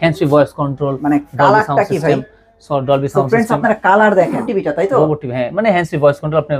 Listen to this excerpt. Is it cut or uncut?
cut